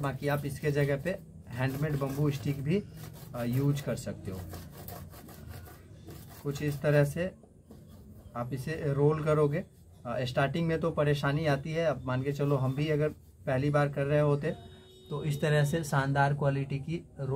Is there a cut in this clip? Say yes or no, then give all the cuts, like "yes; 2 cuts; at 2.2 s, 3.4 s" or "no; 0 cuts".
no; 0 cuts